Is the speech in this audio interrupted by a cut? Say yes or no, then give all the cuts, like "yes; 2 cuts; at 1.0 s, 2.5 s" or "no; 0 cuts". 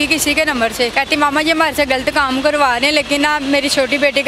yes; 1 cut; at 0.9 s